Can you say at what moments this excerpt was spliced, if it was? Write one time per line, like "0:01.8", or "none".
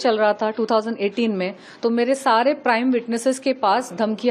none